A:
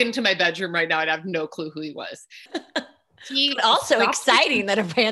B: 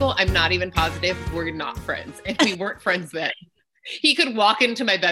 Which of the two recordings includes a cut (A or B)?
A